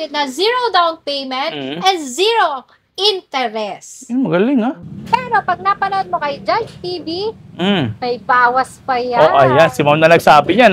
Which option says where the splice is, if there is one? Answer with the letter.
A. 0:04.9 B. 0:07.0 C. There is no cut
A